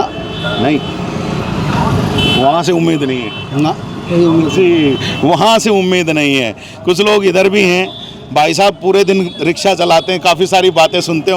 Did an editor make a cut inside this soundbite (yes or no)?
no